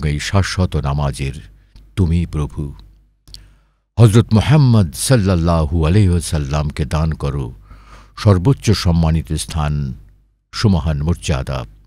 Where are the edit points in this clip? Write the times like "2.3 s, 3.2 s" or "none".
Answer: none